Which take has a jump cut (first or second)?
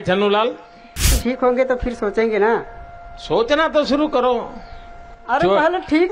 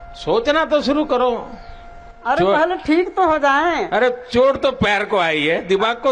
first